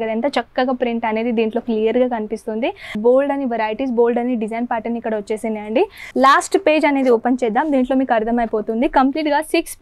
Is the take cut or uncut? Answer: cut